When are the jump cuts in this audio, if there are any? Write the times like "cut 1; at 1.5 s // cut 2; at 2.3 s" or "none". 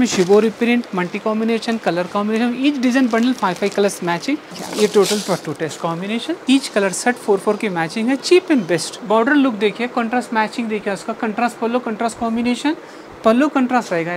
cut 1; at 4.6 s // cut 2; at 6.3 s // cut 3; at 8.9 s